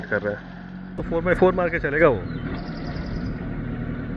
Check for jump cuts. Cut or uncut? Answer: cut